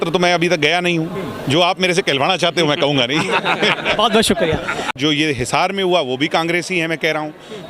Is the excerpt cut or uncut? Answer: cut